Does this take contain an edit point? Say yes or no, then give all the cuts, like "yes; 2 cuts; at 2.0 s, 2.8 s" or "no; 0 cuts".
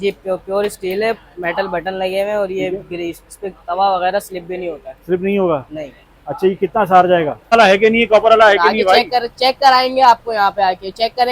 yes; 1 cut; at 7.5 s